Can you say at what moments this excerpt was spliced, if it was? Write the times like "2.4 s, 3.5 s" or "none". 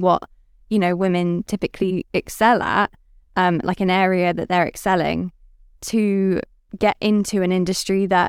6.6 s